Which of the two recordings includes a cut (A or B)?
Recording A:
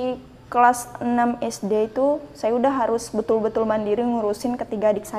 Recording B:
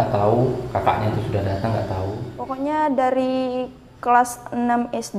B